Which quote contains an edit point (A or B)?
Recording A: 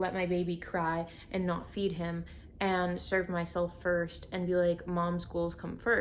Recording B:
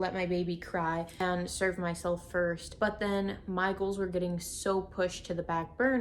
B